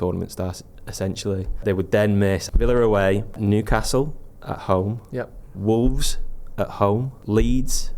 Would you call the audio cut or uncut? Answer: cut